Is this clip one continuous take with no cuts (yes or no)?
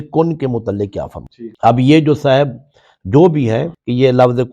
yes